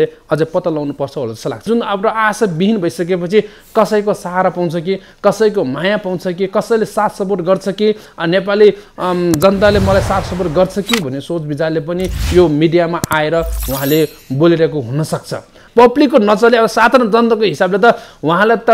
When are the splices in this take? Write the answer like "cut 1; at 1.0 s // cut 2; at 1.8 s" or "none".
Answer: cut 1; at 1.7 s // cut 2; at 15.6 s

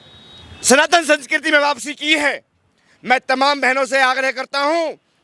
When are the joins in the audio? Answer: none

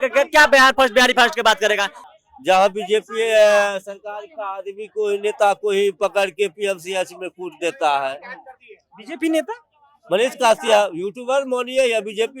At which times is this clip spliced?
cut 1; at 1.9 s

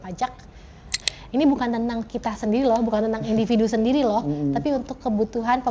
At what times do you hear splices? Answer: cut 1; at 1.0 s

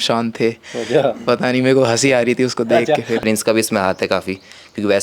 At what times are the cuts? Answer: cut 1; at 3.2 s

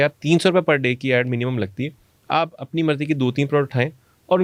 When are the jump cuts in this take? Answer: none

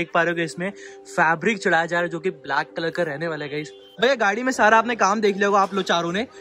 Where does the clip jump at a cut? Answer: cut 1; at 3.9 s

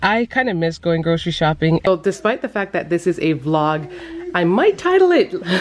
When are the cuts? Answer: cut 1; at 1.8 s

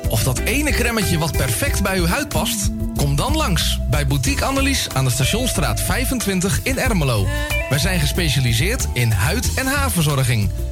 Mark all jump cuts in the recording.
none

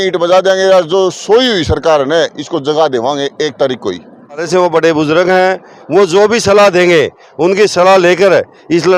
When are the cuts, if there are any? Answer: cut 1; at 4.4 s

